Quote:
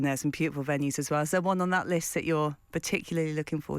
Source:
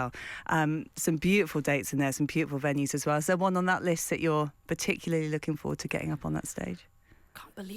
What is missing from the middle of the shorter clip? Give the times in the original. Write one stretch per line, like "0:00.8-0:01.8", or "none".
none